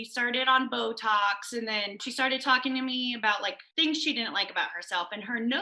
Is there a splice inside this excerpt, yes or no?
yes